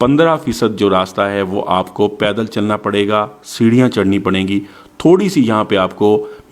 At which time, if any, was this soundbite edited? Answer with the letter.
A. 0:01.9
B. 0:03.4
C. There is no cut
C